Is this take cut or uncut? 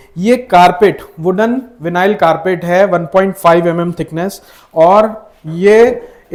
uncut